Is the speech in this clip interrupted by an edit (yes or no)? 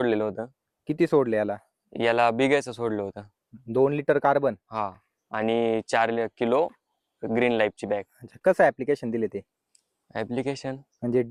no